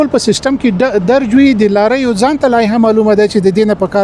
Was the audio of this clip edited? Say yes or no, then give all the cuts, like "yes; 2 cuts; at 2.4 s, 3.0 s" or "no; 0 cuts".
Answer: no; 0 cuts